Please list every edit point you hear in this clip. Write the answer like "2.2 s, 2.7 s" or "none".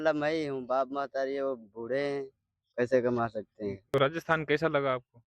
3.8 s